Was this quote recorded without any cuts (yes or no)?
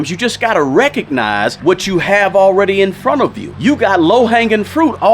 no